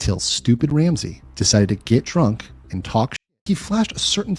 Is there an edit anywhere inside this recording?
yes; 1 cut; at 3.2 s

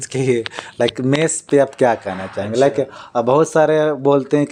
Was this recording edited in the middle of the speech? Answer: no; 0 cuts

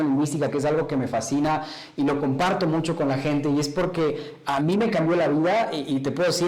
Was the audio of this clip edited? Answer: no; 0 cuts

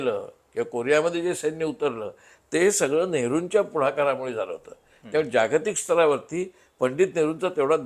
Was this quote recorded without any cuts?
yes; 0 cuts

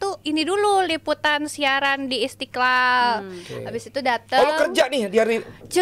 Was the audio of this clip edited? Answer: no; 0 cuts

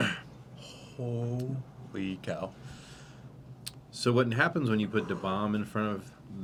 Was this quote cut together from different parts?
no; 0 cuts

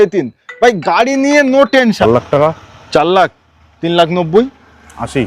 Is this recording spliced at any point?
yes; 1 cut; at 2.0 s

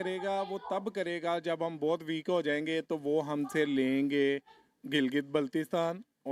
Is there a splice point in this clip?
no; 0 cuts

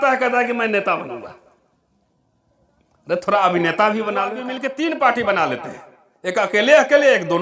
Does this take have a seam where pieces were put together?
yes; 1 cut; at 4.5 s

